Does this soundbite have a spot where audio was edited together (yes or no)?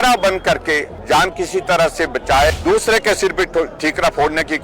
yes